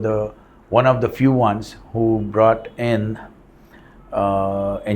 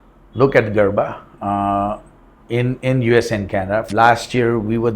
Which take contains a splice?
second; 1 cut; at 3.9 s

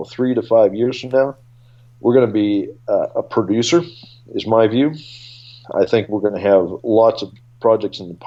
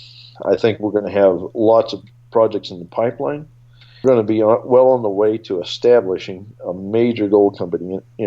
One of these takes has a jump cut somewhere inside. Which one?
second; 1 cut; at 4.0 s

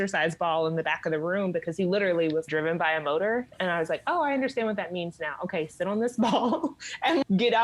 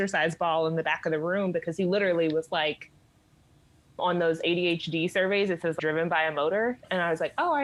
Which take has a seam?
first; 1 cut; at 2.5 s

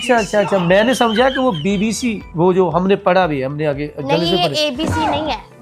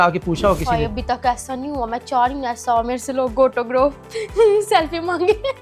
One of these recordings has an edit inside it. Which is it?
first; 1 cut; at 2.2 s

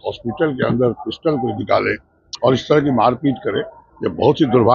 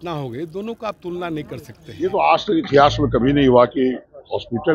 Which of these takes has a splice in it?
second; 1 cut; at 2.1 s

